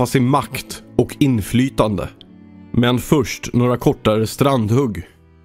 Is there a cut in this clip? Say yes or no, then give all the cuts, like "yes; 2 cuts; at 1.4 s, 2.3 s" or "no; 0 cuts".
no; 0 cuts